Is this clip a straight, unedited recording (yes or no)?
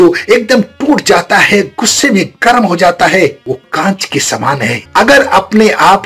no